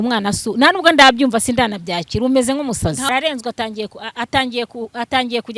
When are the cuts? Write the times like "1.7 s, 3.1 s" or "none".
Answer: 3.1 s

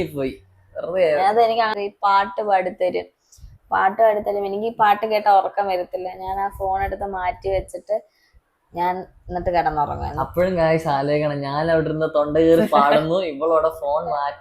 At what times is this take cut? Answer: 1.7 s

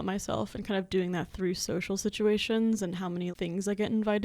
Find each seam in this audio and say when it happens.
3.3 s

